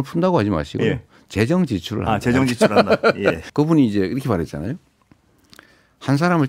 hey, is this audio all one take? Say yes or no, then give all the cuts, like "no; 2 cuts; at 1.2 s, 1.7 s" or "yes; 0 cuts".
no; 1 cut; at 3.4 s